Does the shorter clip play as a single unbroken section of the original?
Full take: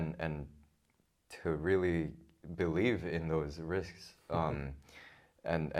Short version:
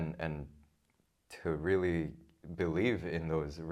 yes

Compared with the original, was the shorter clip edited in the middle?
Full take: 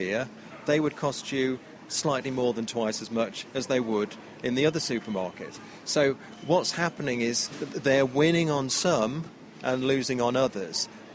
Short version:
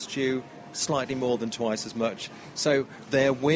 yes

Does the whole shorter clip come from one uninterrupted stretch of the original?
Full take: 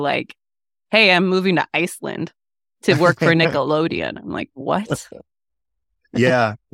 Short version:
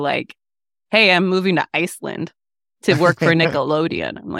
yes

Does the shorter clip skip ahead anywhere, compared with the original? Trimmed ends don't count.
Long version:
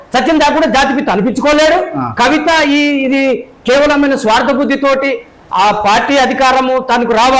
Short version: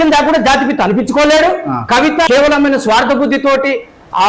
yes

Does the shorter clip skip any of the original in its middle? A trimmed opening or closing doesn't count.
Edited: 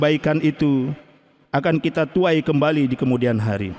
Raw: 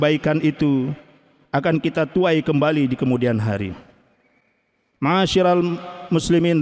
no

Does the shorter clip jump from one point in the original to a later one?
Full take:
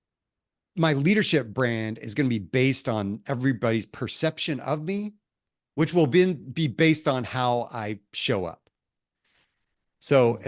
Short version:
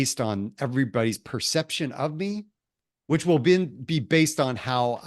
no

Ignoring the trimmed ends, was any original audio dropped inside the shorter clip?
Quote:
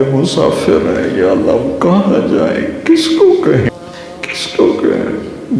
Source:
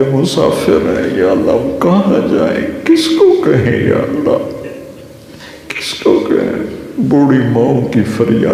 yes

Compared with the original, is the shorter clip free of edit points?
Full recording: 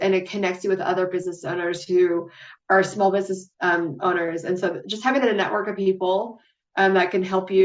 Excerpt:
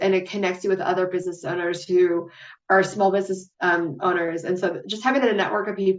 yes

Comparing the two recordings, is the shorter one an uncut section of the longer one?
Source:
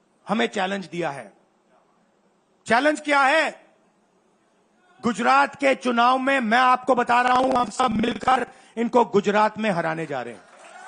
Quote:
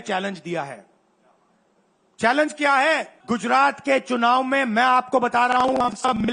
no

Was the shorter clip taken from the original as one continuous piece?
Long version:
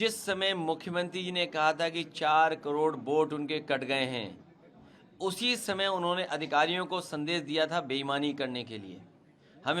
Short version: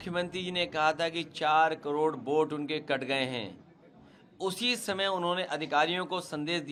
yes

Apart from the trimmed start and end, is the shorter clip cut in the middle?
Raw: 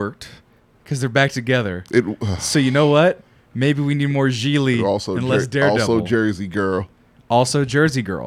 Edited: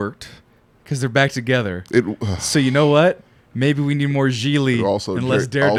no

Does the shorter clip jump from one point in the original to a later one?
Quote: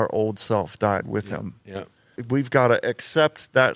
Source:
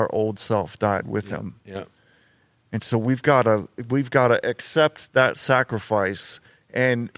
yes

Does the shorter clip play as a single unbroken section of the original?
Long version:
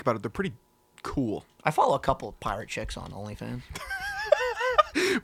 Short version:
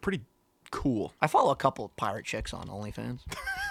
no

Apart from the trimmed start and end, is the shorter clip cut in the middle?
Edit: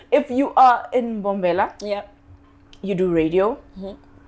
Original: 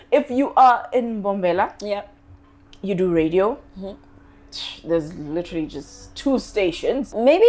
no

